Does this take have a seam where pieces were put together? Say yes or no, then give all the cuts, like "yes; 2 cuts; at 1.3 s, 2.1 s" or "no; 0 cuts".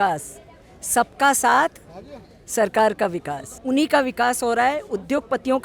yes; 1 cut; at 3.6 s